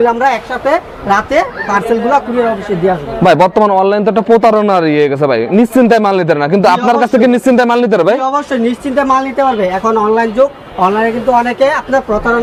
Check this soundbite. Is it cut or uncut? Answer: uncut